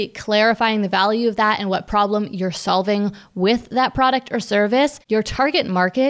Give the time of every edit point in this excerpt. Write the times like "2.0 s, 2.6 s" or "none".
5.0 s